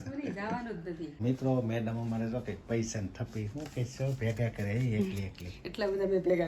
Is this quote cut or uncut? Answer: cut